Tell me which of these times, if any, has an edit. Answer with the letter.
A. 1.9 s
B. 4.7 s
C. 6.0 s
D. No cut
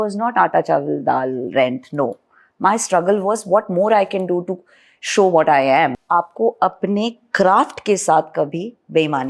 C